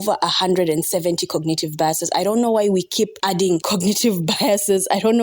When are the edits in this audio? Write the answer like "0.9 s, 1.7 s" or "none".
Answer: 3.4 s